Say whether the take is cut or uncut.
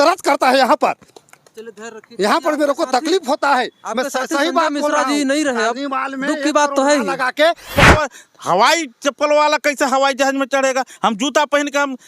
cut